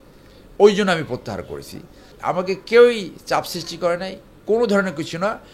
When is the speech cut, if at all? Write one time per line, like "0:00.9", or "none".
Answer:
0:02.1